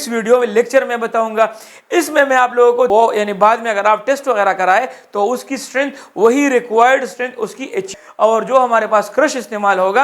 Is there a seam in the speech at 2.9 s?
yes; 2 cuts; at 2.9 s, 7.9 s

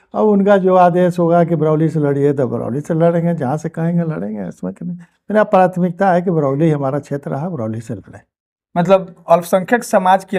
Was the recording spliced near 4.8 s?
no; 0 cuts

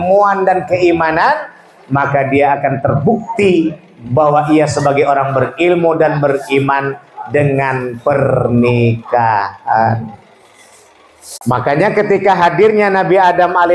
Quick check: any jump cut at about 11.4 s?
yes; 1 cut; at 11.4 s

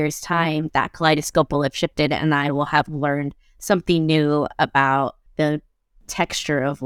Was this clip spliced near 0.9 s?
no; 1 cut; at 5.2 s

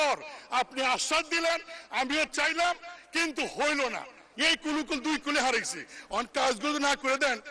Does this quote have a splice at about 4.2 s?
yes; 1 cut; at 4.2 s

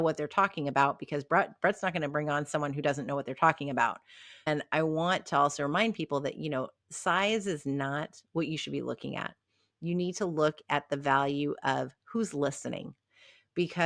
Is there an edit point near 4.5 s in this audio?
yes; 1 cut; at 4.5 s

